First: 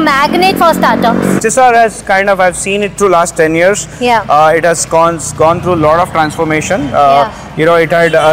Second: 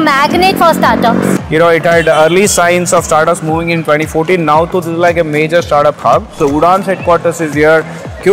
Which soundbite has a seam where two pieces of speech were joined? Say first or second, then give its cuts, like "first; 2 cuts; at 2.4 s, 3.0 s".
second; 2 cuts; at 1.4 s, 6.4 s